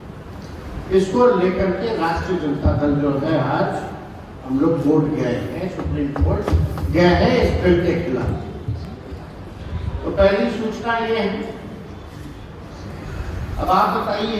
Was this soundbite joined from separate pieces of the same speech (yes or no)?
no